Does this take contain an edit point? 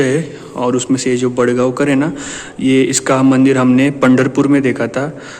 no; 0 cuts

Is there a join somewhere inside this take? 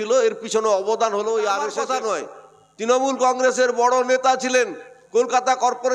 yes; 1 cut; at 1.8 s

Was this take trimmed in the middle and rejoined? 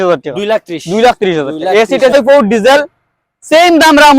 yes; 1 cut; at 2.1 s

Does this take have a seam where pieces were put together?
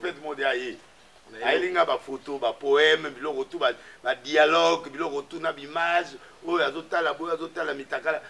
no; 0 cuts

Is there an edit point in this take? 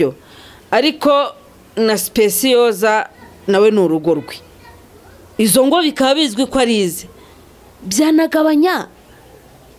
no; 0 cuts

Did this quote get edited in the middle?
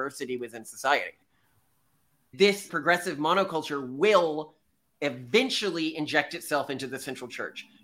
yes; 1 cut; at 2.3 s

